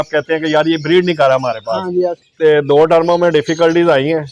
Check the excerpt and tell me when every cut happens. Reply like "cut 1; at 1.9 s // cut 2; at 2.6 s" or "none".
cut 1; at 2.2 s